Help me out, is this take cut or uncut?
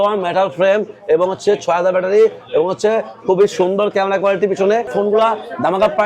cut